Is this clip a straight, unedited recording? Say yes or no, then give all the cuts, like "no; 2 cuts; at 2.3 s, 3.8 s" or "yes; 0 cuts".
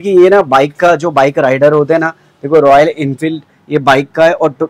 yes; 0 cuts